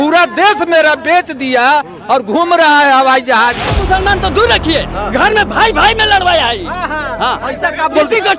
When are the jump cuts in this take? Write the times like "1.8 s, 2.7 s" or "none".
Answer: 3.7 s